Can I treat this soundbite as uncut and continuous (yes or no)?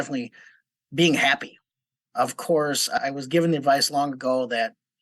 no